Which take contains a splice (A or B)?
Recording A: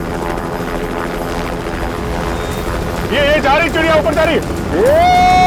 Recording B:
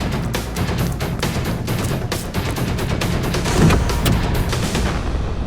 B